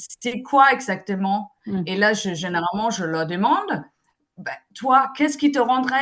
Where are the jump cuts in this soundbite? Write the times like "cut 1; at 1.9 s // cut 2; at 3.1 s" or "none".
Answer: none